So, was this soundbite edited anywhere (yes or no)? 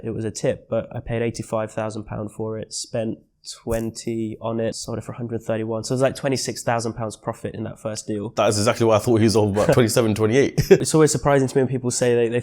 yes